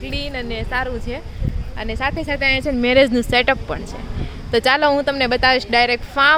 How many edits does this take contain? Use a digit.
0